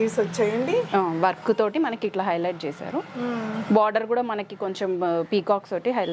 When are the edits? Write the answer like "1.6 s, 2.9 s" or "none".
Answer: none